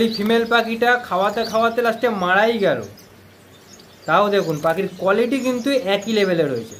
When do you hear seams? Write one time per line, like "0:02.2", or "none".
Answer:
none